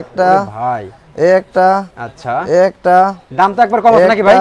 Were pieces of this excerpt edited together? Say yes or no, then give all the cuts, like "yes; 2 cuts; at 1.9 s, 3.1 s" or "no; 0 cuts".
no; 0 cuts